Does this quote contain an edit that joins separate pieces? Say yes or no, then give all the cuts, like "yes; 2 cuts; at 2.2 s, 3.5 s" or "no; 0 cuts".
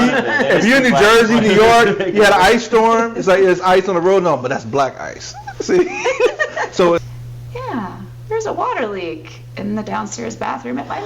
yes; 1 cut; at 7.0 s